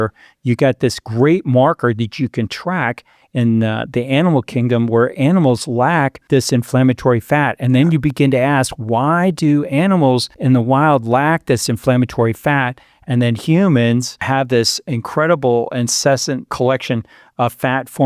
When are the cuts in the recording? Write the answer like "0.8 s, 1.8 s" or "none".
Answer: 6.2 s, 10.3 s, 14.2 s, 16.5 s